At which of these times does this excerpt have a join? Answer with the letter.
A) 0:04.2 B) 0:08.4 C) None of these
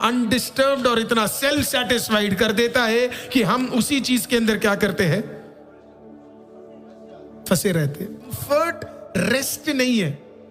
B